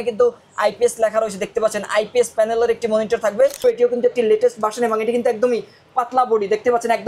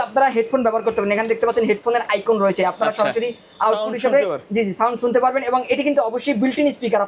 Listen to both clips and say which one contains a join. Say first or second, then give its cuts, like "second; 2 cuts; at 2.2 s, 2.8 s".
first; 1 cut; at 3.6 s